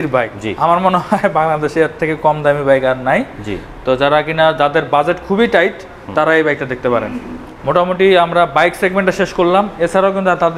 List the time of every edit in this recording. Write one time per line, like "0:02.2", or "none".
none